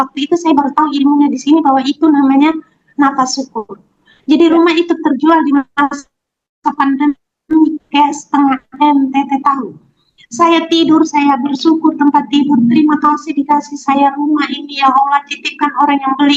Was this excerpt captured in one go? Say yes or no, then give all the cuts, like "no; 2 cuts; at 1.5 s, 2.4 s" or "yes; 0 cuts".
yes; 0 cuts